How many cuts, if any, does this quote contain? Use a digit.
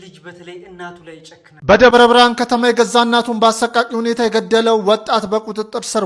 1